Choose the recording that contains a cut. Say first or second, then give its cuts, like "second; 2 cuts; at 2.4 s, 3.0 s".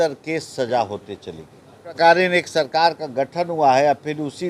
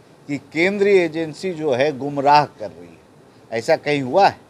first; 1 cut; at 2.0 s